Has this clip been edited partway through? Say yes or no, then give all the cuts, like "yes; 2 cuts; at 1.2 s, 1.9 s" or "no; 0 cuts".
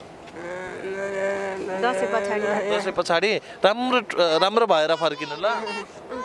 no; 0 cuts